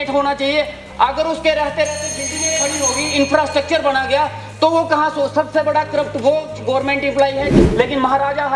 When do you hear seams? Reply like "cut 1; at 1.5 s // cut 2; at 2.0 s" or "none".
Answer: cut 1; at 7.6 s